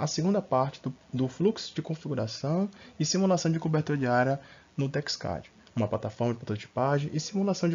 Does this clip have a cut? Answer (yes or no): no